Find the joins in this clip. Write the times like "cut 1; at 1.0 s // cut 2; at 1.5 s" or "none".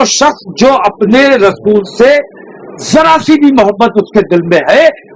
none